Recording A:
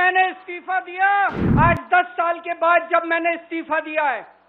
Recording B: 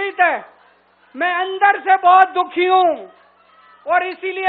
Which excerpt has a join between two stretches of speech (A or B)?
A